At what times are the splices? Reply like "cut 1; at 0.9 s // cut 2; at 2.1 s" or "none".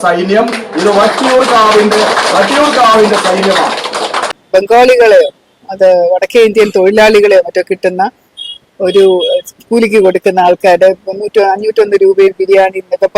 cut 1; at 4.4 s